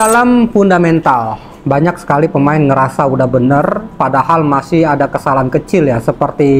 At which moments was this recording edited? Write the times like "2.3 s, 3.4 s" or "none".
none